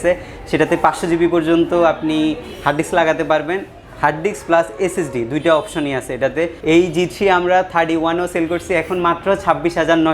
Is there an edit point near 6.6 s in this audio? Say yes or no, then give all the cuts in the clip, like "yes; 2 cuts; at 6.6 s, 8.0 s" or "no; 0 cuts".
yes; 1 cut; at 6.6 s